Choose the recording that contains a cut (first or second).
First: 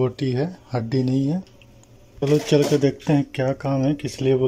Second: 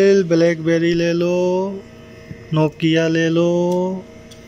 first